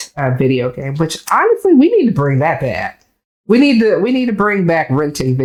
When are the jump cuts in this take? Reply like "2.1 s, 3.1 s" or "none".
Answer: none